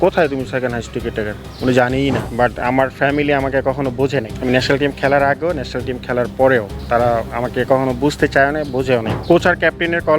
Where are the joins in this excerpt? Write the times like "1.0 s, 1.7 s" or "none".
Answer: 2.3 s, 4.3 s, 6.8 s, 9.1 s